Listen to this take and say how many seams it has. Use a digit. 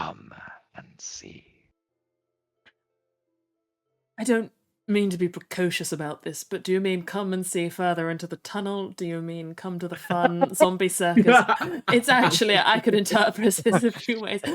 1